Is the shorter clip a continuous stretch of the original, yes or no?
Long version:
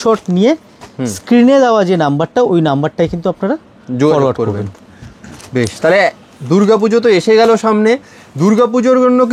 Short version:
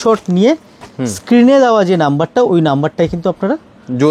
yes